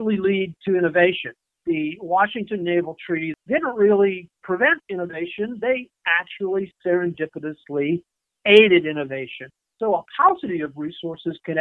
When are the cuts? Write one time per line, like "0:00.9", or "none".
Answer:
0:01.6
0:03.3
0:09.8